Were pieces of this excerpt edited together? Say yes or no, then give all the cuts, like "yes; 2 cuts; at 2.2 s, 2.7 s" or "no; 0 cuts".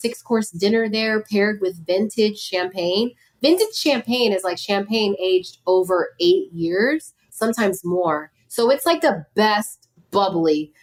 no; 0 cuts